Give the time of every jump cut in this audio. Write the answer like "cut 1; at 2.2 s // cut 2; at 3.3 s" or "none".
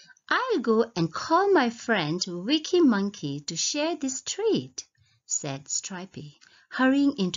cut 1; at 1.8 s